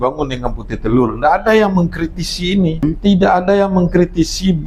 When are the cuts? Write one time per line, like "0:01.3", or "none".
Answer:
0:02.8